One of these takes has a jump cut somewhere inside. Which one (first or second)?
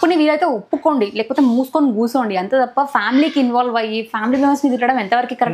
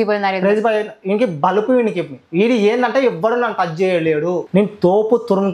second